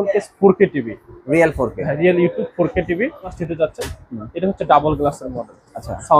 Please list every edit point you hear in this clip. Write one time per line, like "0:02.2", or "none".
0:03.4